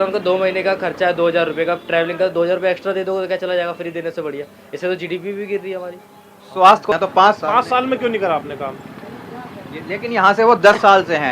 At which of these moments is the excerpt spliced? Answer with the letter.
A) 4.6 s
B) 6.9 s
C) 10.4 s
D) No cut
B